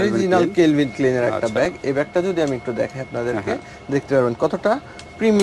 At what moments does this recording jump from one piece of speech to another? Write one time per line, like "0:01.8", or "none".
none